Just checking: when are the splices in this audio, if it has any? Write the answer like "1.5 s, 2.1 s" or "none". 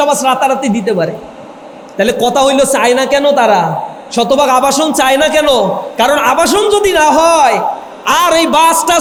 none